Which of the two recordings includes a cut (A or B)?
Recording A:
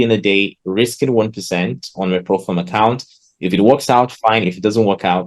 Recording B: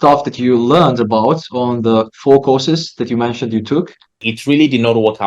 B